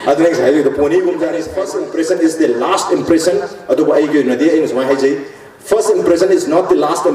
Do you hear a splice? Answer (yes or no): yes